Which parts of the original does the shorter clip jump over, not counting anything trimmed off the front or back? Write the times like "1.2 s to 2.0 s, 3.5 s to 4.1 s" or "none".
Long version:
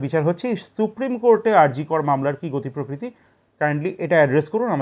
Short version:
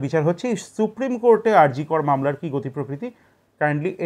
none